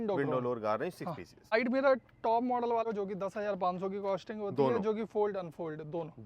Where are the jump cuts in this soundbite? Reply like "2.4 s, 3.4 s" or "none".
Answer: 1.5 s, 2.9 s